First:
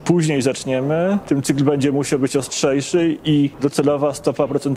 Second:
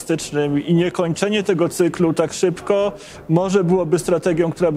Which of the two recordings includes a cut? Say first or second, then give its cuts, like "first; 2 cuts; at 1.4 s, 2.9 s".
first; 2 cuts; at 1.2 s, 3.5 s